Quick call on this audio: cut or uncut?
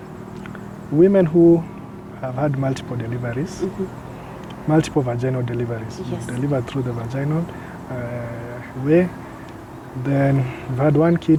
uncut